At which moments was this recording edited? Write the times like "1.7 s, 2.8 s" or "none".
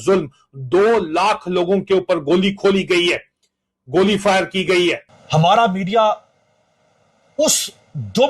5.1 s

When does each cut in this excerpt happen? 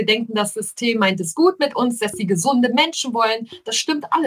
none

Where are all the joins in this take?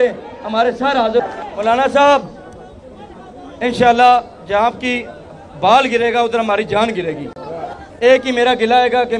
1.4 s, 7.7 s

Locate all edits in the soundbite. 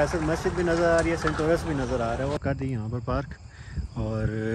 2.4 s

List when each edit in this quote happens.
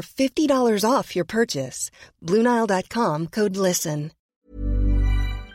4.3 s

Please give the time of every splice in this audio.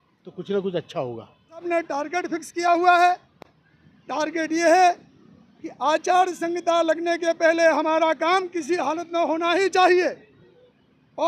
1.7 s

